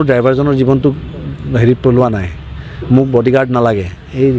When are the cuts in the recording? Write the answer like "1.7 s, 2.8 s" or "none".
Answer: none